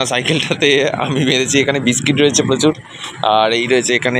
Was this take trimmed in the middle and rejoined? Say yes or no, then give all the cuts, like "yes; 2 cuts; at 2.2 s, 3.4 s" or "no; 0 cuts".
no; 0 cuts